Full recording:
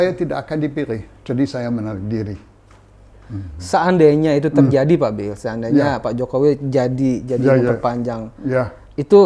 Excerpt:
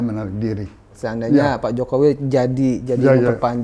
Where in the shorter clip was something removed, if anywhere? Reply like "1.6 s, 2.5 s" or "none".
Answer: 1.0 s